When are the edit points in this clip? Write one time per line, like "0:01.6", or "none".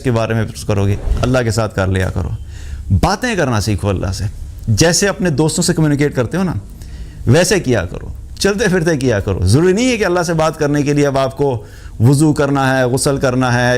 0:01.0